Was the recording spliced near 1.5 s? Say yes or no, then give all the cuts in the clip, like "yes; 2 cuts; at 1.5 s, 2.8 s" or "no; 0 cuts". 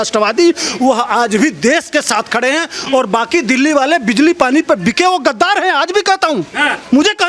no; 0 cuts